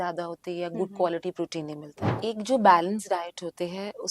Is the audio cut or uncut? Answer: cut